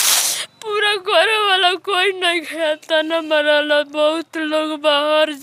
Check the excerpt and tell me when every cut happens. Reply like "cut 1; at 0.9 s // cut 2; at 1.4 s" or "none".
none

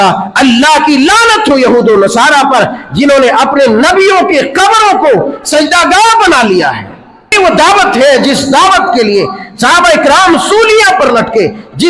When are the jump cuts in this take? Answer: cut 1; at 7.3 s

